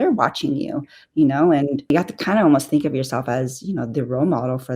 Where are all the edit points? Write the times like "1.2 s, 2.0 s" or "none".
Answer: none